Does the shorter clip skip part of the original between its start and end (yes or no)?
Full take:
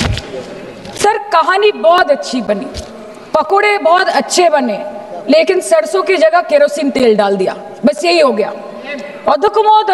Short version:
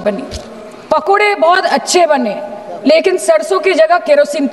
no